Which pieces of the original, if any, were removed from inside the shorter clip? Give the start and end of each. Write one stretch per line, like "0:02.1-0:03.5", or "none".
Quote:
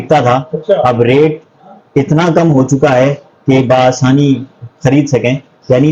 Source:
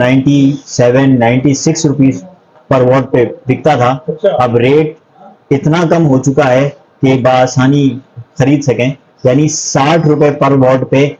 none